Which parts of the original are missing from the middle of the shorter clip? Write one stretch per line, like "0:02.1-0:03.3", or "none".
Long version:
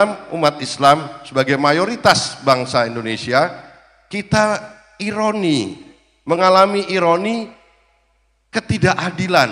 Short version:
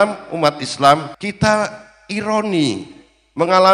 0:01.2-0:04.1